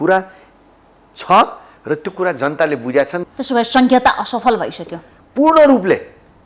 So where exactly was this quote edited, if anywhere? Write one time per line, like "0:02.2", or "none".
0:03.2